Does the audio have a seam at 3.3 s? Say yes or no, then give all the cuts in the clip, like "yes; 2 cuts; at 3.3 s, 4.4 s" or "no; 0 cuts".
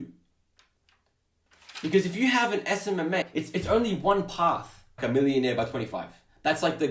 yes; 2 cuts; at 3.3 s, 4.9 s